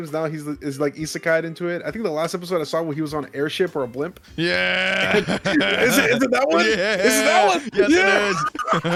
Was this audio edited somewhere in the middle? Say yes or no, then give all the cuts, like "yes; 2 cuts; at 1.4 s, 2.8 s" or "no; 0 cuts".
no; 0 cuts